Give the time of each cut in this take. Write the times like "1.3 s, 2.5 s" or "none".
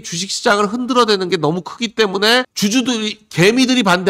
none